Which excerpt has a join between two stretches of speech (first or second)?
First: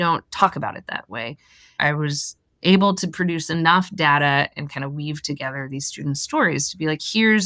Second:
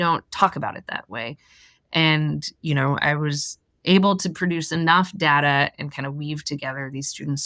first